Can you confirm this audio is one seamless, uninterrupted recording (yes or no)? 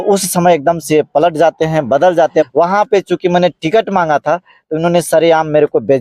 no